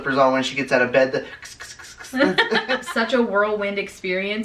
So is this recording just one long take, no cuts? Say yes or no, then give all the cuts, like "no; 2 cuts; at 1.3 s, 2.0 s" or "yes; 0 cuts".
no; 1 cut; at 2.8 s